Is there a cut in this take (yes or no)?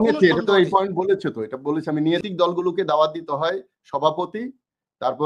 yes